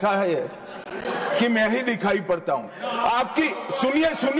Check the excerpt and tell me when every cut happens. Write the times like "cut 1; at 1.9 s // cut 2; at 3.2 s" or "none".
none